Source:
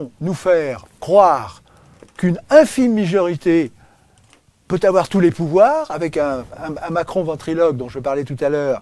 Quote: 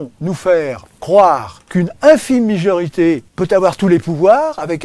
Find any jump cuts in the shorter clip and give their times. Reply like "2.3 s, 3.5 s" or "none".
1.6 s, 3.3 s